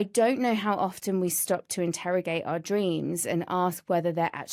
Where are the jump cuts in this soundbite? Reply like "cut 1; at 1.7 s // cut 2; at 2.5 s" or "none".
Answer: none